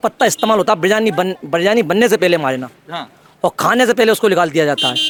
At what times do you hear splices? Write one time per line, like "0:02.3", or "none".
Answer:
none